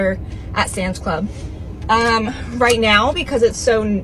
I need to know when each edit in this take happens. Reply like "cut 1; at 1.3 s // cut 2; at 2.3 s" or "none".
none